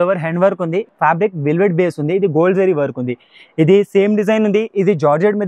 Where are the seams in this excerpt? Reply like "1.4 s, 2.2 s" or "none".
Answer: 0.9 s